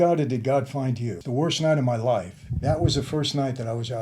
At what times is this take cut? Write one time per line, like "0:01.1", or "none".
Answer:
0:01.1
0:02.4